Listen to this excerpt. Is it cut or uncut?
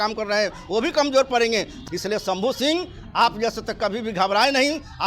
cut